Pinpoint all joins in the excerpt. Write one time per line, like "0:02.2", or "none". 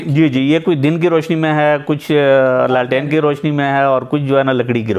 none

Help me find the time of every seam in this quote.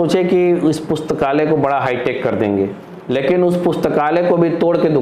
0:02.8

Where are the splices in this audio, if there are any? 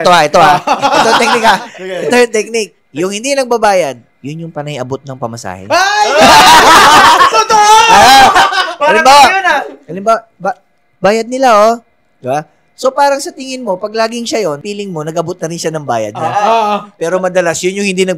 none

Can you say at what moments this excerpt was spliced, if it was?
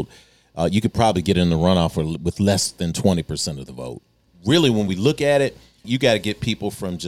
0:04.2
0:05.8

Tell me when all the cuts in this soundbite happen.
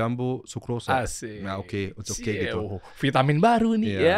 none

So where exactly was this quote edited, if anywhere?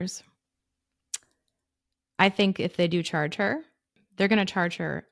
0:04.0

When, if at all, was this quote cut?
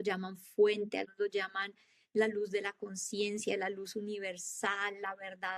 0:01.1

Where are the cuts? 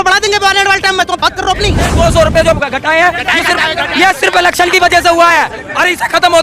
0:01.9

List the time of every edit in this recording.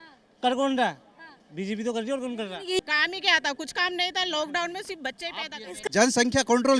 0:02.8
0:05.8

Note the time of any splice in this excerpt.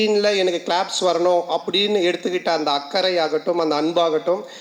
none

